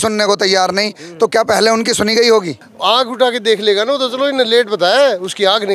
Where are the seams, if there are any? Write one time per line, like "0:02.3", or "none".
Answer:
0:02.6